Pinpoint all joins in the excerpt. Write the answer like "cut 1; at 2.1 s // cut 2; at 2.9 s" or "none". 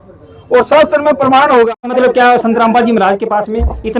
cut 1; at 1.9 s